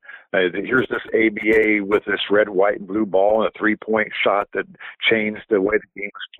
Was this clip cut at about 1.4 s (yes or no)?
no